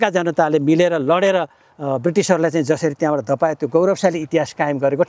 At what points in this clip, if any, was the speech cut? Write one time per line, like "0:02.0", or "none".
none